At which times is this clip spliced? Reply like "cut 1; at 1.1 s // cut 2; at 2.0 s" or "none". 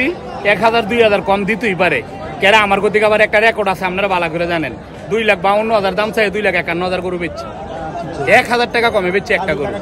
none